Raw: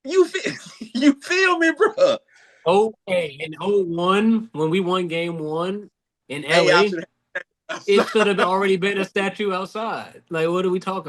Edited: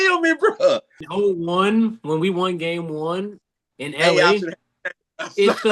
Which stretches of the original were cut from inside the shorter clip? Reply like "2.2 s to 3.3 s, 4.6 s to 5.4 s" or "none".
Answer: 2.3 s to 3.5 s